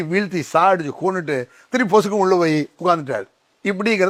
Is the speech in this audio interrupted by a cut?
no; 0 cuts

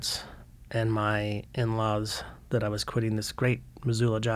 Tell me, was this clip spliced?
no; 0 cuts

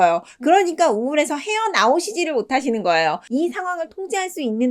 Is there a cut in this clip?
yes; 1 cut; at 3.2 s

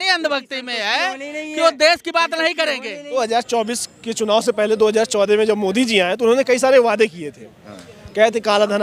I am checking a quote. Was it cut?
yes; 1 cut; at 3.2 s

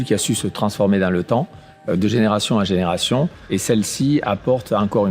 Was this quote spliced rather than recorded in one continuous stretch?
no; 0 cuts

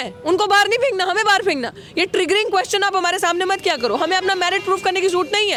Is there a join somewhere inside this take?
no; 0 cuts

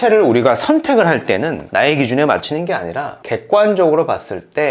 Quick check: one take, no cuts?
no; 1 cut; at 1.6 s

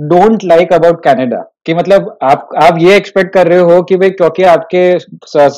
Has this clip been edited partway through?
yes; 1 cut; at 1.6 s

